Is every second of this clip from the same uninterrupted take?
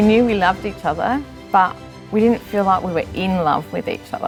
yes; 0 cuts

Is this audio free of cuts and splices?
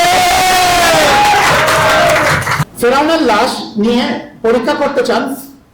no; 1 cut; at 2.6 s

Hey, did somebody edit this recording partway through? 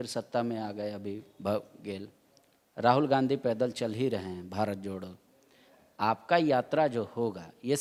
no; 0 cuts

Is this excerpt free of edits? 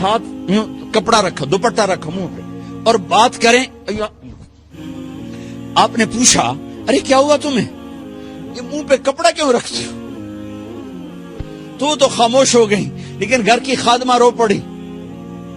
yes; 0 cuts

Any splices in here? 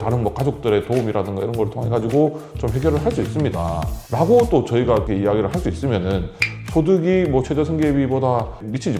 no; 0 cuts

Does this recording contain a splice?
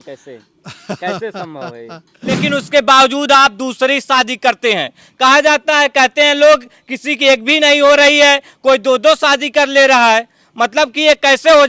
yes; 1 cut; at 2.4 s

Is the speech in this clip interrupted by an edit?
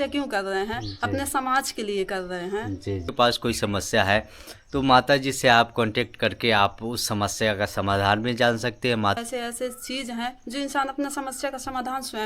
yes; 2 cuts; at 3.1 s, 9.2 s

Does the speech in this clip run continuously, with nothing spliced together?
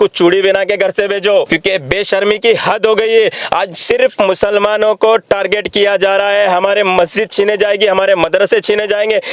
no; 1 cut; at 1.5 s

